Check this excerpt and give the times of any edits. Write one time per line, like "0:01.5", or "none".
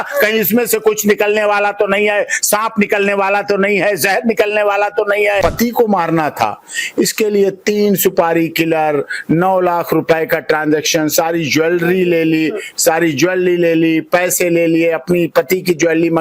0:05.4